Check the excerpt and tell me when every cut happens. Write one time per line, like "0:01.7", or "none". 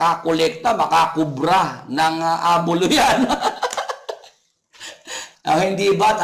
0:05.2